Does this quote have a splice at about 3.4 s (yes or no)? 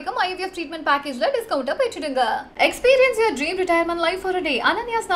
no